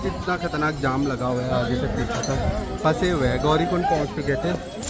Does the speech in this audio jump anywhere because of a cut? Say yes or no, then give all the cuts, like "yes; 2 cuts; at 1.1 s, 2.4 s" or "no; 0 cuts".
no; 0 cuts